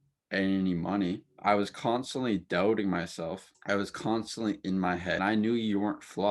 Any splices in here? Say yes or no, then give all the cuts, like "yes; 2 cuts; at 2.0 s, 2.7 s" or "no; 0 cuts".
yes; 3 cuts; at 1.3 s, 3.5 s, 5.2 s